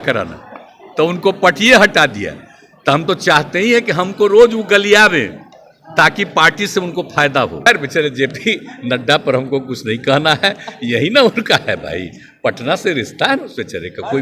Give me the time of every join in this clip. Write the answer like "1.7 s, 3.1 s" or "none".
7.7 s